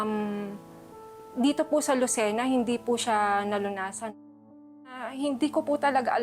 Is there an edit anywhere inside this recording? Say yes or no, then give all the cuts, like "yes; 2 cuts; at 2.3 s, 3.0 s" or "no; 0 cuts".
yes; 1 cut; at 5.1 s